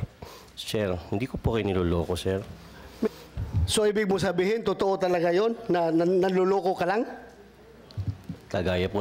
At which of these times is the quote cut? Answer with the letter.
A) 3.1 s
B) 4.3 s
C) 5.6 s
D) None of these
A